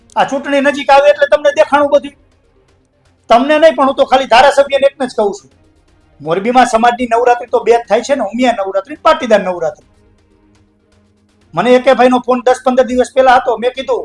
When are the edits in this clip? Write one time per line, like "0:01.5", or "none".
none